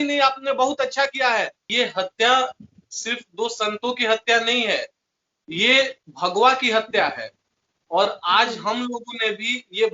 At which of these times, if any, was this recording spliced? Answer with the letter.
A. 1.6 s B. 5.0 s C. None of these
A